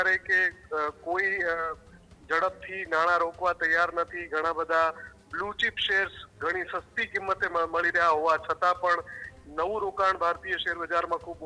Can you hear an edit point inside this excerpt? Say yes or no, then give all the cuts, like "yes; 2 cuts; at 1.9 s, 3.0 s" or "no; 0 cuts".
no; 0 cuts